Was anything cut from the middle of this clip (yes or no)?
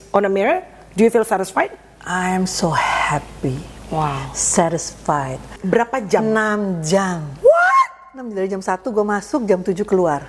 yes